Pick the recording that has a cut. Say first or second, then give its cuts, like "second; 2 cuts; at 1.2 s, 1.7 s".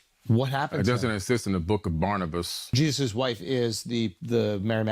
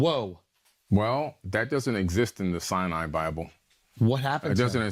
first; 1 cut; at 2.6 s